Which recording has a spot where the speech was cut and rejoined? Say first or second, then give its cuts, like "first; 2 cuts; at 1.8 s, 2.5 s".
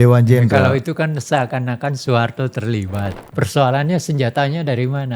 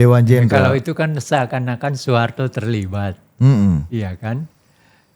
first; 1 cut; at 3.2 s